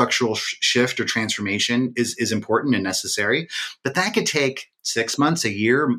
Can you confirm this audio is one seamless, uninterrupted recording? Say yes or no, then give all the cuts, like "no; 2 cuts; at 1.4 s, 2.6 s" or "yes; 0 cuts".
yes; 0 cuts